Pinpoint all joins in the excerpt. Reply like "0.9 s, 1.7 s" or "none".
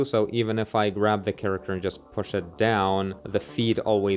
3.2 s

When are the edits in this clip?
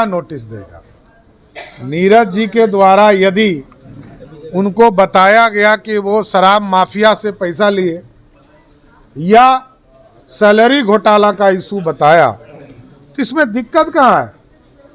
none

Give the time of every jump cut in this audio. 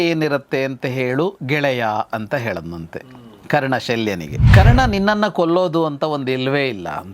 4.3 s

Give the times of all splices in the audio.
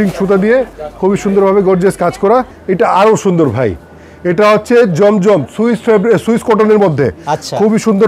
2.6 s

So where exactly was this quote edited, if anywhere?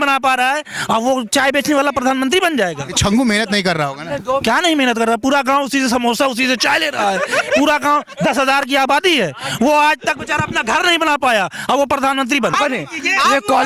12.6 s

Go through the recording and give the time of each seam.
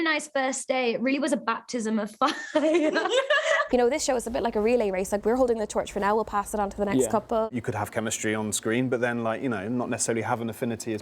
3.6 s, 7.5 s

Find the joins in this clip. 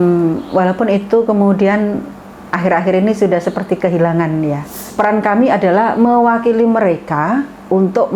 4.9 s

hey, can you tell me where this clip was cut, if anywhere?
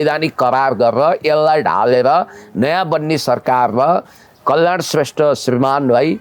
none

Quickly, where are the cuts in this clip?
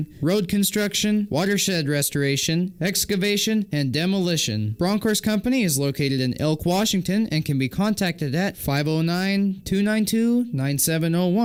none

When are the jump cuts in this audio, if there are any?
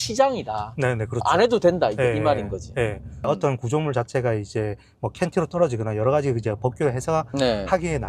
3.2 s

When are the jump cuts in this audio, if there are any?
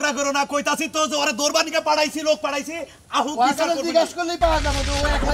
none

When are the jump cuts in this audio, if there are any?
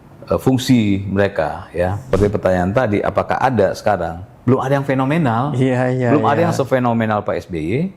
2.0 s

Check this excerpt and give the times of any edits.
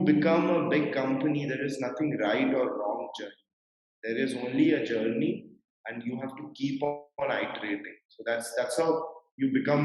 none

